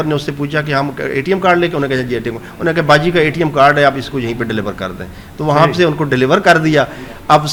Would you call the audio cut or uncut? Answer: uncut